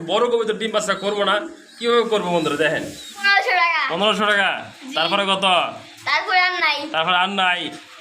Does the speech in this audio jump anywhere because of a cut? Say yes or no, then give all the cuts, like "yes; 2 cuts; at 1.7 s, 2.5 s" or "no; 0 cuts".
yes; 1 cut; at 3.3 s